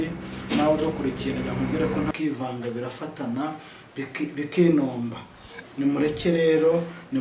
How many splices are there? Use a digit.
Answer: 1